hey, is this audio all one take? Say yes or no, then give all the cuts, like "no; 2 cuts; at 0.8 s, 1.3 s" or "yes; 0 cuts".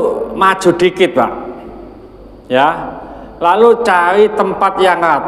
yes; 0 cuts